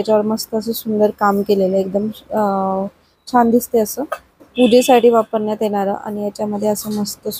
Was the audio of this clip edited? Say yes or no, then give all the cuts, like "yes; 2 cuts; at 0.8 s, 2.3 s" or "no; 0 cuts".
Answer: no; 0 cuts